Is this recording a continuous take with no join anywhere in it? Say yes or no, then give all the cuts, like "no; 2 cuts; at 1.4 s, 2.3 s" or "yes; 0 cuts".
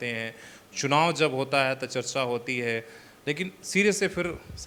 yes; 0 cuts